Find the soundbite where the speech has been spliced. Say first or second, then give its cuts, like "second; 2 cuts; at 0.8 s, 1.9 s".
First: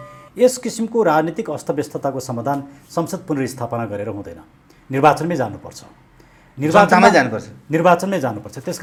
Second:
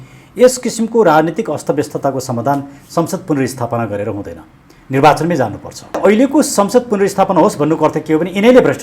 second; 1 cut; at 6.0 s